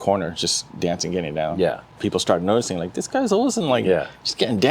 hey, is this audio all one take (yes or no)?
no